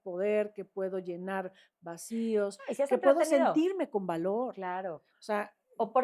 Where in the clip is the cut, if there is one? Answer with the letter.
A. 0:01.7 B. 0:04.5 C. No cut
C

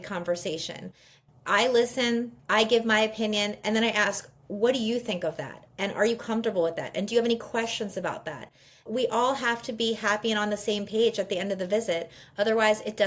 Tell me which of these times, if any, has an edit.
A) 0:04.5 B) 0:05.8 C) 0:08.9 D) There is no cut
C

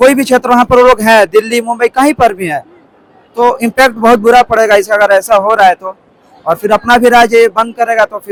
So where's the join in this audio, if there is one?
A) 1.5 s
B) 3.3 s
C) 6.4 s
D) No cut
D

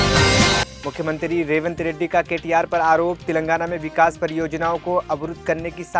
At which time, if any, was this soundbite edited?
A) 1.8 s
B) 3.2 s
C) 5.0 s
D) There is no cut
D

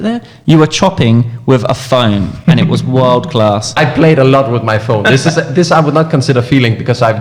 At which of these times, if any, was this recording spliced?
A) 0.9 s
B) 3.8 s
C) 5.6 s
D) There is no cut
B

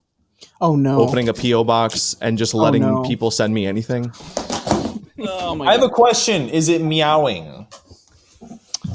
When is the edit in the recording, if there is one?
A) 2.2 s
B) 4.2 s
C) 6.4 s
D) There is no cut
B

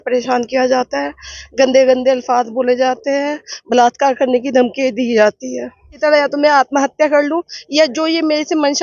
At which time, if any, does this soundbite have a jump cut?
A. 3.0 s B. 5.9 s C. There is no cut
B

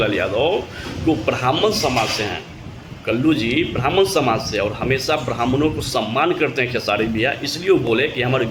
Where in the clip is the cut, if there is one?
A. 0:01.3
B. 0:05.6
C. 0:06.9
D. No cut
D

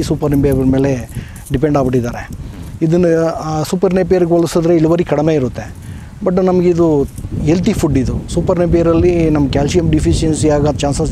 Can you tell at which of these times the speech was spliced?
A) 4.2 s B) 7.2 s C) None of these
B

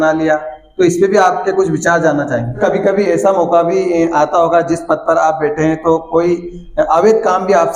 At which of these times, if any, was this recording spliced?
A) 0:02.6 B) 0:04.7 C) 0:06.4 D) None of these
A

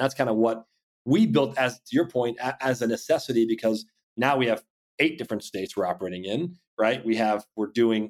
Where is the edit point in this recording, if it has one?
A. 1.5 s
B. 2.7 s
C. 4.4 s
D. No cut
D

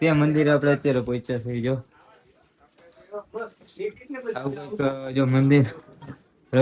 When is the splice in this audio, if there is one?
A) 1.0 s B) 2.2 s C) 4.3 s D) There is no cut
D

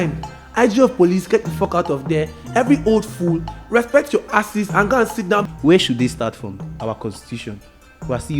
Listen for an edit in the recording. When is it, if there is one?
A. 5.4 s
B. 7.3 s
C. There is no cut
A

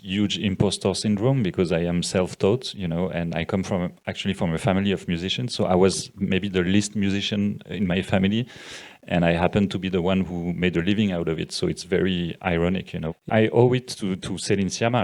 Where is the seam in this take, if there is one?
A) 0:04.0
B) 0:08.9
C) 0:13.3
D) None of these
C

